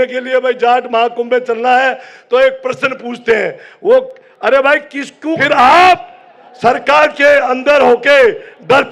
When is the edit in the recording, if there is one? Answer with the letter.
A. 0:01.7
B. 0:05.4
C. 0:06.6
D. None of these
B